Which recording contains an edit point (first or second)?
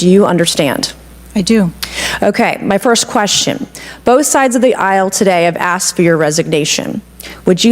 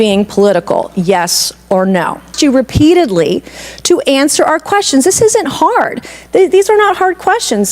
second